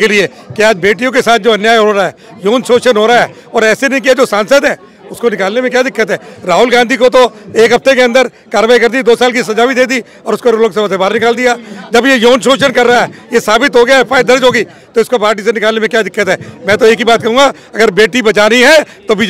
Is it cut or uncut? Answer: uncut